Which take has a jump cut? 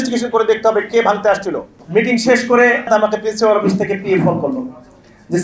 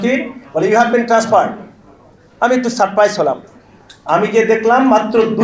first; 2 cuts; at 1.7 s, 2.9 s

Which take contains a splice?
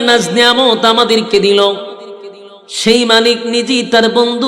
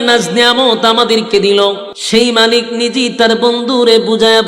second; 1 cut; at 1.9 s

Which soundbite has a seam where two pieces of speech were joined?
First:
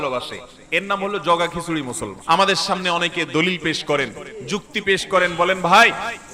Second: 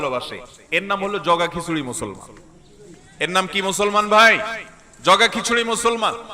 first; 1 cut; at 2.1 s

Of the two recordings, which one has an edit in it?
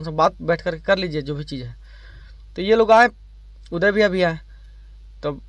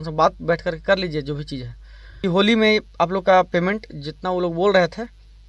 second; 1 cut; at 2.2 s

